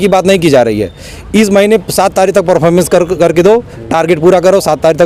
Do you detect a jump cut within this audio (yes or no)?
no